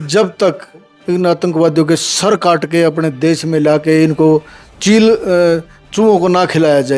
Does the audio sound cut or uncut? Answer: cut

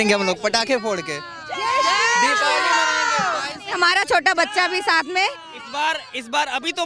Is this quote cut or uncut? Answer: uncut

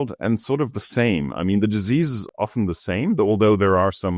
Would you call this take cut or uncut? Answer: uncut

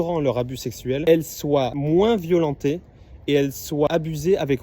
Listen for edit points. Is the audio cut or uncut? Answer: cut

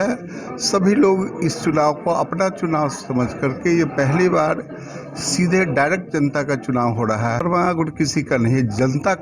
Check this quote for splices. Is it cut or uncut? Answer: cut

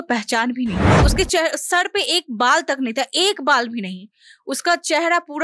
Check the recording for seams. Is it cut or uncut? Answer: cut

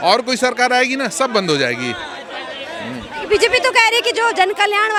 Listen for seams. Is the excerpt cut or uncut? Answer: uncut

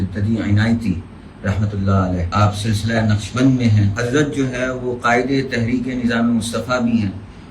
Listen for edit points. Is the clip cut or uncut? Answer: cut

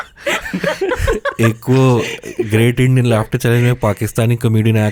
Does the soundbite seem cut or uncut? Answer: uncut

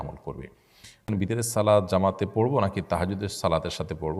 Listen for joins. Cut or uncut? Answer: cut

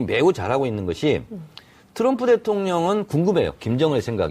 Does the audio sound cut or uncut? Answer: cut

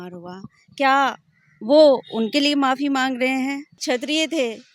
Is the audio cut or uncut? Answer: cut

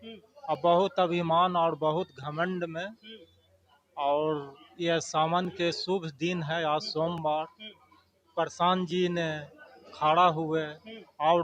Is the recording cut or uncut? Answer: uncut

